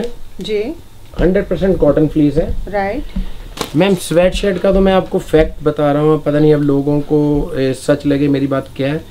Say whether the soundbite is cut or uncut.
uncut